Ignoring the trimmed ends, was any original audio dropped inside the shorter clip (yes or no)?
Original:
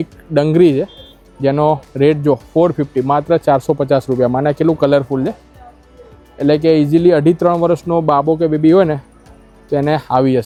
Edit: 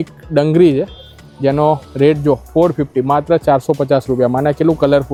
no